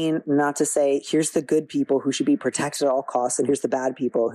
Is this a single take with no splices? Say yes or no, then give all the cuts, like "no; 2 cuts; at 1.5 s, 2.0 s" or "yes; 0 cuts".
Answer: yes; 0 cuts